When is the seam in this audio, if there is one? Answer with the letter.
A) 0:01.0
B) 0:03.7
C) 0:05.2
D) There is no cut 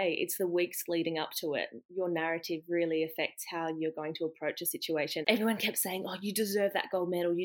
C